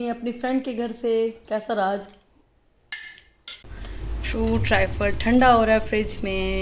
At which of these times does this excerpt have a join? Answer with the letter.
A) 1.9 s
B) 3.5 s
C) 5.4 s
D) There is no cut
B